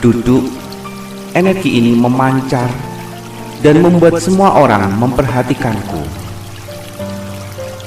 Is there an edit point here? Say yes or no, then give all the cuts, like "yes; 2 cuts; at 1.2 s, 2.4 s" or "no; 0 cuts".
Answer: yes; 1 cut; at 6.1 s